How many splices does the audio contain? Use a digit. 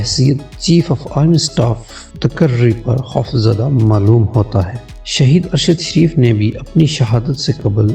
1